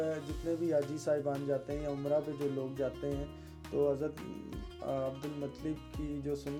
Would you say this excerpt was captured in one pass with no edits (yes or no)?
yes